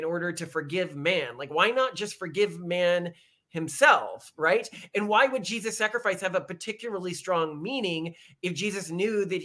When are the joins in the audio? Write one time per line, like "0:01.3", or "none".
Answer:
none